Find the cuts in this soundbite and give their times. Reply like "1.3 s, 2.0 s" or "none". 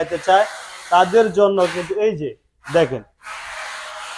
none